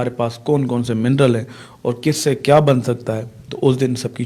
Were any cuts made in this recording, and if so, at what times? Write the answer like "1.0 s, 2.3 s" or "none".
none